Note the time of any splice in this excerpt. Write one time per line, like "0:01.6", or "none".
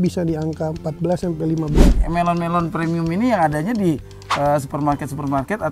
0:01.9